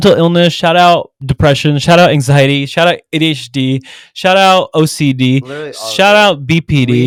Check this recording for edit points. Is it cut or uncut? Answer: uncut